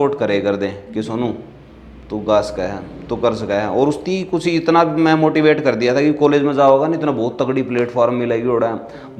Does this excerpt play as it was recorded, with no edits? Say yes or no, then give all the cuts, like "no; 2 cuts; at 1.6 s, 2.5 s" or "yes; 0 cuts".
yes; 0 cuts